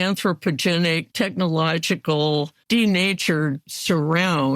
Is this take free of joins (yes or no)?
no